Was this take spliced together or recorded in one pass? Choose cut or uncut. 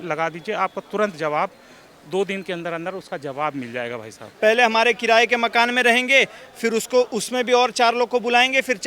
cut